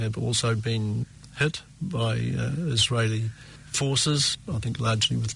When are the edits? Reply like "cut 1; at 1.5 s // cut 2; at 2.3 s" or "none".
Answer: none